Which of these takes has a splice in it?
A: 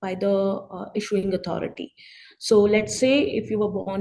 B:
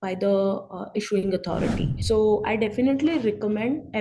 B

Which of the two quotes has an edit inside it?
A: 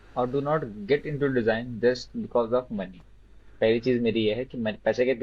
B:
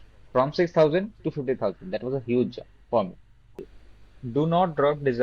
B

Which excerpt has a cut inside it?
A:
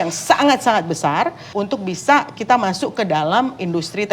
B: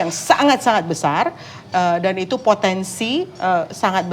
A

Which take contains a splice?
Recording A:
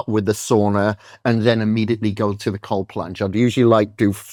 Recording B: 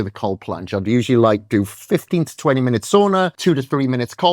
B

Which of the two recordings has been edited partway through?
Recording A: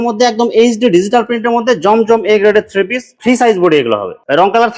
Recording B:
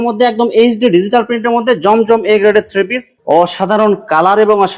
B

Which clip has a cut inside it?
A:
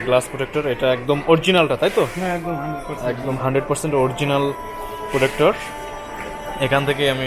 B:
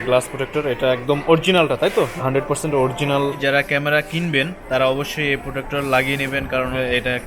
B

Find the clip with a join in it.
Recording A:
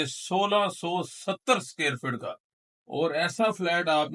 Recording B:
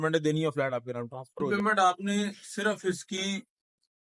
B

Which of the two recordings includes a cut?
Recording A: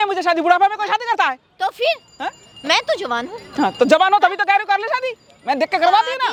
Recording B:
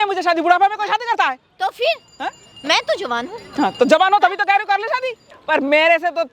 B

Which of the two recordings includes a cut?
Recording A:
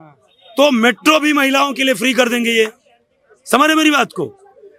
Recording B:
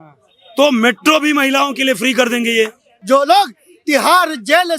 B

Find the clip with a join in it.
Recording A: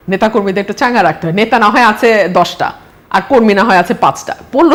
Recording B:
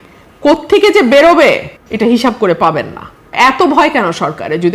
B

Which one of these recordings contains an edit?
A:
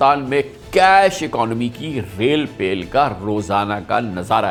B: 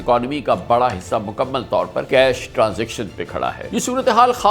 B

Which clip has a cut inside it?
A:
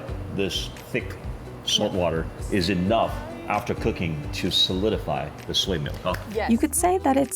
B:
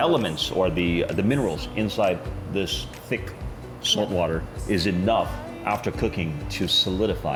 A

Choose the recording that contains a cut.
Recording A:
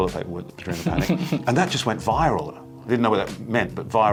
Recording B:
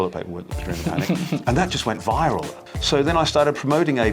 B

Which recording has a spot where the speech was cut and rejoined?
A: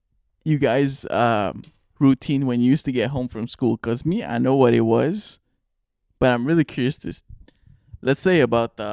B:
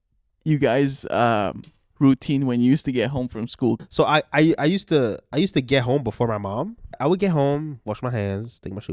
B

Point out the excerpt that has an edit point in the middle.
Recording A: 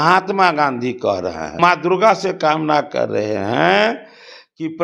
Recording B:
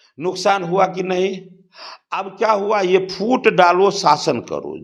A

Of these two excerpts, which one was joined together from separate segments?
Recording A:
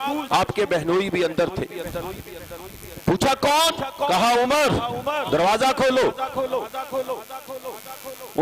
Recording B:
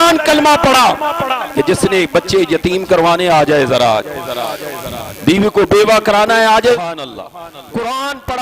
B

